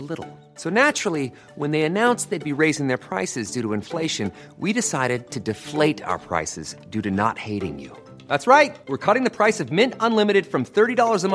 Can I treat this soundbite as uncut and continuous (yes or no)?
yes